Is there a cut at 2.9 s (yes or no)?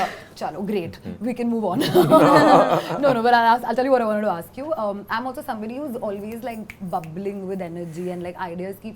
no